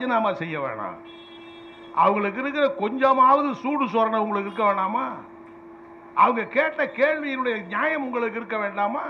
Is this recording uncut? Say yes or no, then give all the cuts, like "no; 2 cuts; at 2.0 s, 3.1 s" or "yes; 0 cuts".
yes; 0 cuts